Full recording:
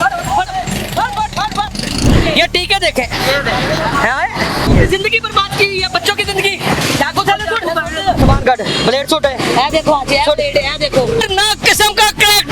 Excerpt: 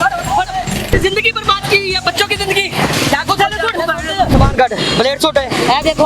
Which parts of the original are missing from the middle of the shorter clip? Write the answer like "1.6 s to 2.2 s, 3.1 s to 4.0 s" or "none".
0.9 s to 4.8 s

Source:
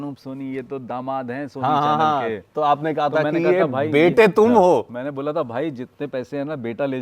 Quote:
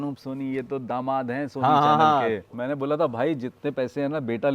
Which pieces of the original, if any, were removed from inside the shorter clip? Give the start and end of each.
2.5 s to 4.9 s

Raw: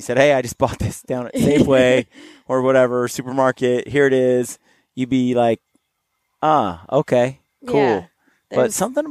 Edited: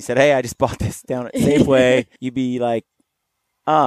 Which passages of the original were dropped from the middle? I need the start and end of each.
2.2 s to 4.9 s

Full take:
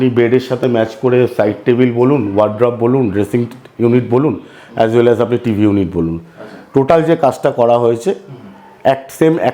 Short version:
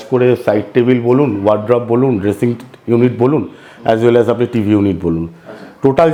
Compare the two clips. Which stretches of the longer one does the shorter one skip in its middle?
none

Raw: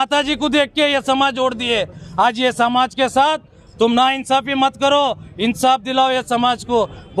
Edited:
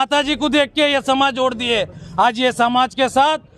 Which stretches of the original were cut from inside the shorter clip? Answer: none

